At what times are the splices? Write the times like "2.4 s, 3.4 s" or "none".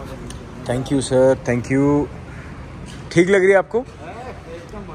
none